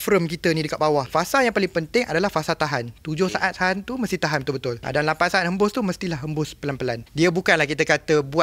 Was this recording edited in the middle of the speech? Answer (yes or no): yes